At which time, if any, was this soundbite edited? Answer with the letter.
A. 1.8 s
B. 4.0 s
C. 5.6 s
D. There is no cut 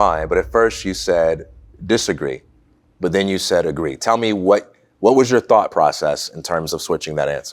D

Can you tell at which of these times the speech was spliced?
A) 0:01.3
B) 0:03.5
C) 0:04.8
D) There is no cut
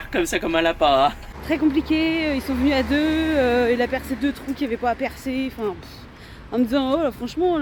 A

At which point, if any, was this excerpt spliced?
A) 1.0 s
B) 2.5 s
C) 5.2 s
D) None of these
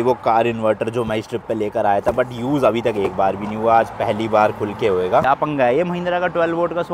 C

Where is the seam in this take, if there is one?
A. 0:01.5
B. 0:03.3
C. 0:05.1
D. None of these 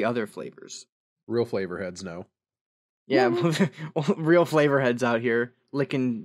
D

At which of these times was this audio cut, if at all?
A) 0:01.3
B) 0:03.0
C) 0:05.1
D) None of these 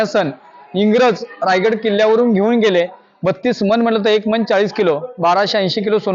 D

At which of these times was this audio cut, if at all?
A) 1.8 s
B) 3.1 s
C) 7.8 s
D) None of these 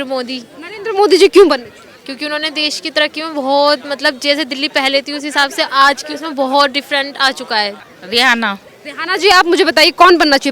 C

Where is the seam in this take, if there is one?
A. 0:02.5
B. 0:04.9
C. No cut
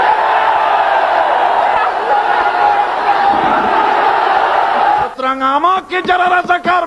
B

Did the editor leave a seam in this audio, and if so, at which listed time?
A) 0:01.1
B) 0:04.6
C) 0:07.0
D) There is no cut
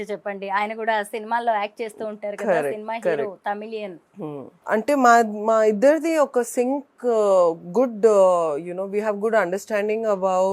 B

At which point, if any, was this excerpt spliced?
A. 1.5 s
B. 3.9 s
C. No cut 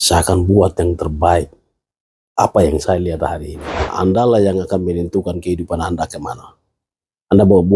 B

